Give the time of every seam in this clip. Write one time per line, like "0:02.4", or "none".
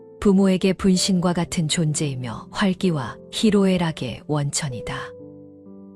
none